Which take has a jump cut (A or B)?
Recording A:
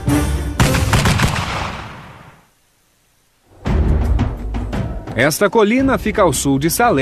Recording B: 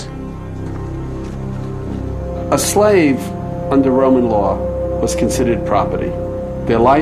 A